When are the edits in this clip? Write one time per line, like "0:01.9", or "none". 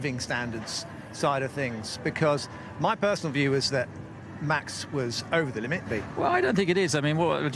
0:02.3
0:06.6